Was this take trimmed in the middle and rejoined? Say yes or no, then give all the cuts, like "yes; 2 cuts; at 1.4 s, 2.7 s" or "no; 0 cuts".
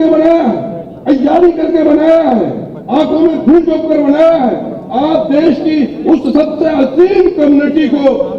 no; 0 cuts